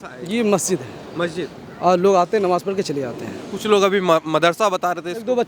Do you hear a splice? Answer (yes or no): no